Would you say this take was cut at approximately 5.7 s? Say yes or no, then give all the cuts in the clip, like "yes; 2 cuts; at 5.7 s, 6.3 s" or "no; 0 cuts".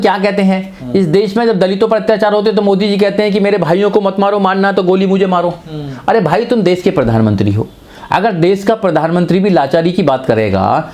no; 0 cuts